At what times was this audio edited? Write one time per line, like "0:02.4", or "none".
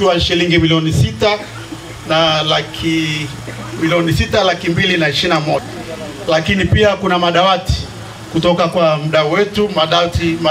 0:05.7